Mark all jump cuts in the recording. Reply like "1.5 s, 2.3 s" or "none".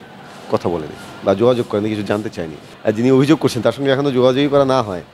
2.6 s